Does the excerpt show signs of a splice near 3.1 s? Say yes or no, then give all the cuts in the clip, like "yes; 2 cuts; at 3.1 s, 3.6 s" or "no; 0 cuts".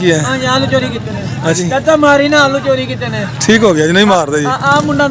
no; 1 cut; at 1.6 s